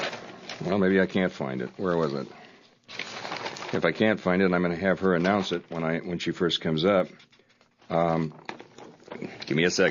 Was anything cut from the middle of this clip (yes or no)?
no